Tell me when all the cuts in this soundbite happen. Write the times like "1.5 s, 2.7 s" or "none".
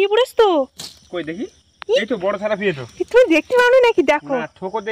none